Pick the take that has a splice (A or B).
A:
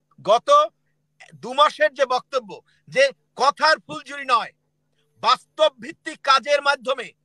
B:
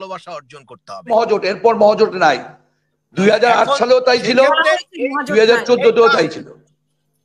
B